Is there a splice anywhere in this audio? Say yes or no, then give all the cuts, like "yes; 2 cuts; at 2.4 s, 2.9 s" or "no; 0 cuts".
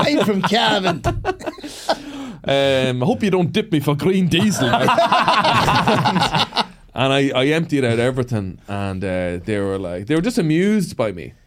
no; 0 cuts